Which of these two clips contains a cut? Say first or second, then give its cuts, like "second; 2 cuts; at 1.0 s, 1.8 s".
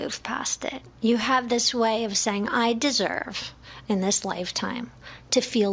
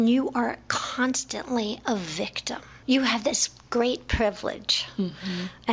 second; 1 cut; at 2.8 s